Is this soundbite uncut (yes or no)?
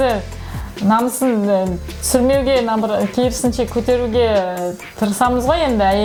yes